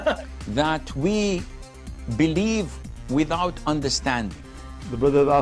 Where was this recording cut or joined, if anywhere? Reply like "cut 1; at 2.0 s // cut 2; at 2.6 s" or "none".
none

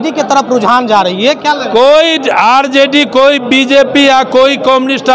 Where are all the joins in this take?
none

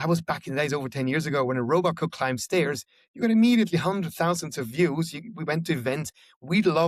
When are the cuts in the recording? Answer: none

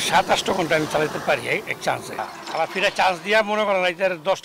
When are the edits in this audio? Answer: none

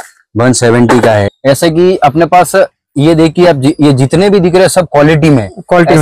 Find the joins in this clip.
cut 1; at 1.3 s

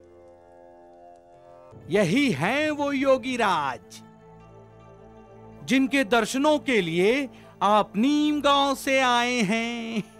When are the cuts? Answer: cut 1; at 1.7 s

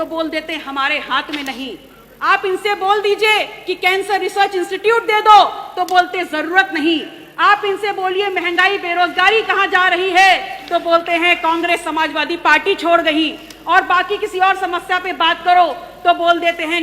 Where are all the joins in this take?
none

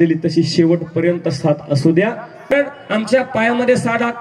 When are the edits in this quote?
cut 1; at 2.5 s

